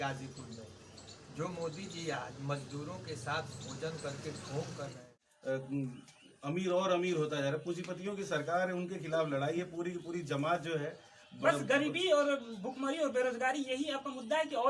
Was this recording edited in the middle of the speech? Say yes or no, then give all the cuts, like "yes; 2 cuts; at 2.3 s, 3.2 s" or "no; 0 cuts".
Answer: yes; 1 cut; at 5.1 s